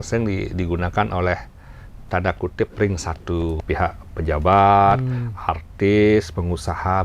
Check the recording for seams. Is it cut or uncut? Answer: cut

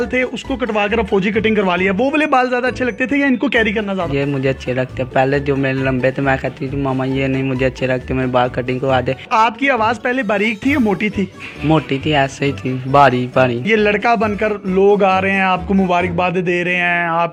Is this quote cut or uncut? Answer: uncut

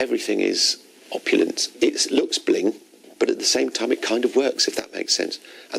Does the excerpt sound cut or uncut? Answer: cut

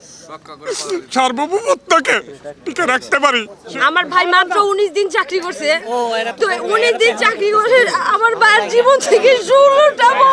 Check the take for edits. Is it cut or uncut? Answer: cut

